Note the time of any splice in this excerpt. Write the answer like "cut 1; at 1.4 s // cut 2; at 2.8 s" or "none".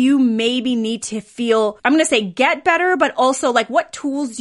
cut 1; at 1.8 s